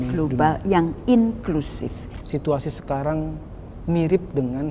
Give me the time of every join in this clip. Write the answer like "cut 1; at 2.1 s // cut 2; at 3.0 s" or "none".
cut 1; at 2.1 s